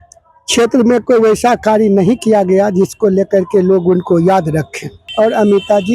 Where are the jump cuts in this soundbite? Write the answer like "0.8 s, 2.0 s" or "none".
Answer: 5.0 s